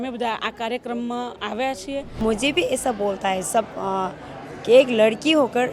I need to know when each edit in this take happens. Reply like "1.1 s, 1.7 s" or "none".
2.1 s